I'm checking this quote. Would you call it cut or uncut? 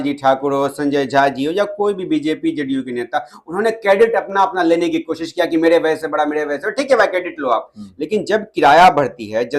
uncut